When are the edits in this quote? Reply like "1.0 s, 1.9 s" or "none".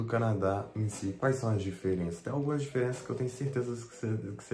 1.1 s